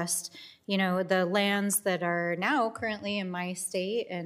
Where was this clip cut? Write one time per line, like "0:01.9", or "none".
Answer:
0:01.6